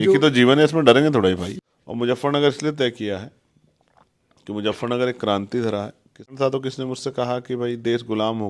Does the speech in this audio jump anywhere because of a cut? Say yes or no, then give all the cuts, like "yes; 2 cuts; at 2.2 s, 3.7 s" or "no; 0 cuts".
yes; 2 cuts; at 1.5 s, 6.3 s